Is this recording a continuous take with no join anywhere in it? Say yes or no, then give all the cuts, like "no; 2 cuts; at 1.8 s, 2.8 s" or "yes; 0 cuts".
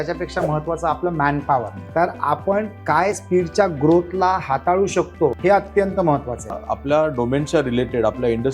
no; 4 cuts; at 1.8 s, 3.2 s, 5.4 s, 6.7 s